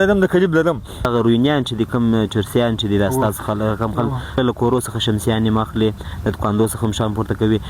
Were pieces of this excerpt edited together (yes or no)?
yes